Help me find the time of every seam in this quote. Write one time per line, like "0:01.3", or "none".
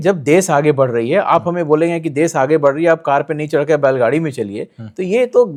none